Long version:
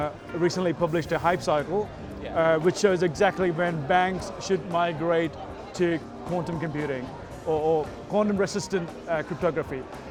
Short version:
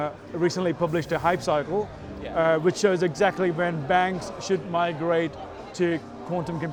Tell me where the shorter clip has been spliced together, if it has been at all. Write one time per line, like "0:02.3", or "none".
none